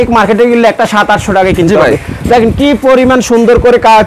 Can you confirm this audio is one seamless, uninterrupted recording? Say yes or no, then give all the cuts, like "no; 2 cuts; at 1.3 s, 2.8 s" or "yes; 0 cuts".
yes; 0 cuts